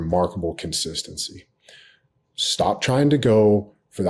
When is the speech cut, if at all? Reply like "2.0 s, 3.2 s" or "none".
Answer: none

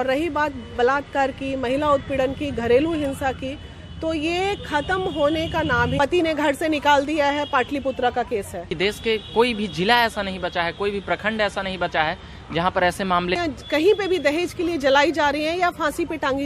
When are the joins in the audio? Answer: 6.0 s, 8.7 s, 13.4 s

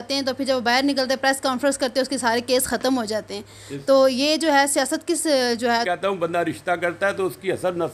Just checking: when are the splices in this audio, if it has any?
5.8 s

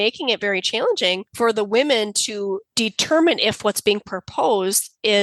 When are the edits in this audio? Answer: 1.3 s, 2.7 s

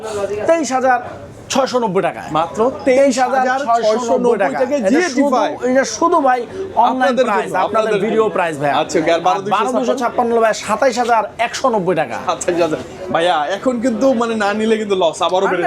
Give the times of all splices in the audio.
none

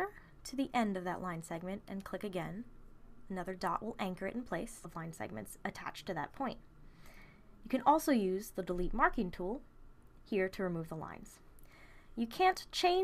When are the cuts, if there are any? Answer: none

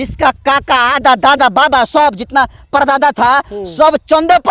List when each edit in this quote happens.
none

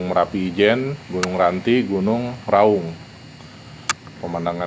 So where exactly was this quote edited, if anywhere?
none

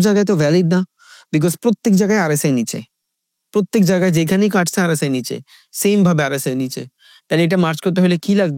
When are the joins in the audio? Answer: none

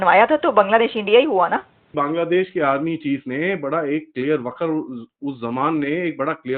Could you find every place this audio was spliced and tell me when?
1.9 s

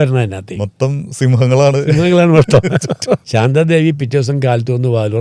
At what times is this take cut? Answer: 3.2 s

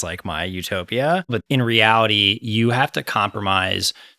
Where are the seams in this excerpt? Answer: 1.2 s

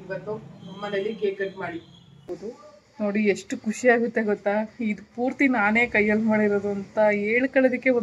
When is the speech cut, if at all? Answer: 2.3 s

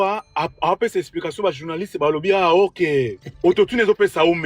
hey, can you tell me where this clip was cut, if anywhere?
3.2 s

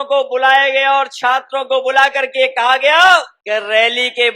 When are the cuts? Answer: 3.4 s

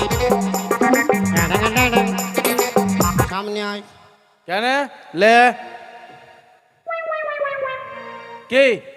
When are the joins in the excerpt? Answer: 3.3 s

